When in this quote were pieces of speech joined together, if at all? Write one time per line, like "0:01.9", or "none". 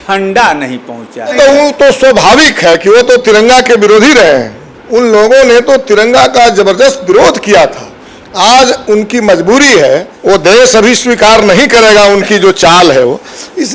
0:01.3
0:04.6
0:10.1